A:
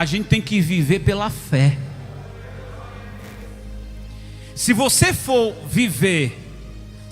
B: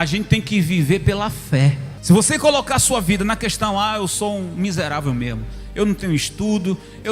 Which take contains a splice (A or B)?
B